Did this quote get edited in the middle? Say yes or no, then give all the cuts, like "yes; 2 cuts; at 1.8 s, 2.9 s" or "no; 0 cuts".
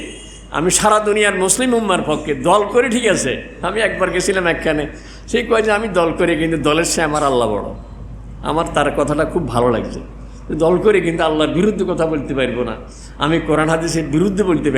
no; 0 cuts